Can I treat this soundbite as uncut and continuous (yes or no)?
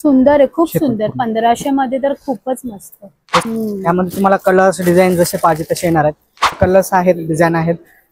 no